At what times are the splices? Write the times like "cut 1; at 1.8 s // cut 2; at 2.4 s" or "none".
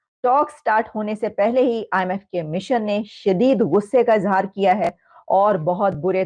none